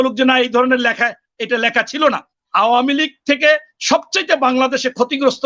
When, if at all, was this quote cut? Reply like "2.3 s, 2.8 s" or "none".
2.4 s